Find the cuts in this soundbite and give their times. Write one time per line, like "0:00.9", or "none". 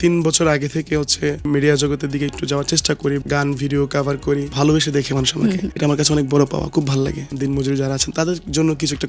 0:01.4
0:03.2
0:04.5
0:05.7
0:07.3